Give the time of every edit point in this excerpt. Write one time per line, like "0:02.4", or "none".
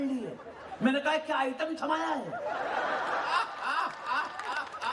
none